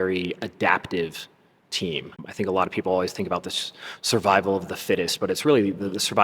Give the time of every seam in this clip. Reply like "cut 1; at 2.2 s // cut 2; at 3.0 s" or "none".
cut 1; at 2.2 s

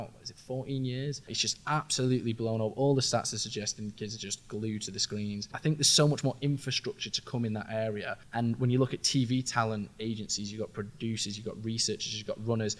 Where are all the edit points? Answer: cut 1; at 1.4 s // cut 2; at 5.5 s // cut 3; at 8.2 s

